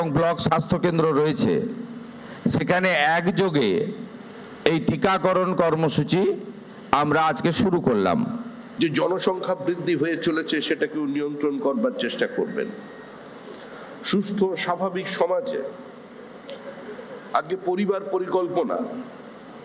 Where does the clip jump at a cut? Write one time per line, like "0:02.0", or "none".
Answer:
0:08.6

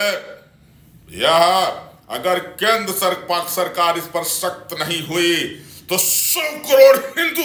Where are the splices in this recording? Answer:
none

